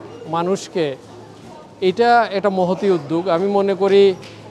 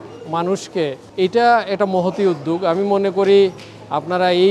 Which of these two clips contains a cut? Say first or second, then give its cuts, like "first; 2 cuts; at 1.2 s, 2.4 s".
second; 1 cut; at 1.0 s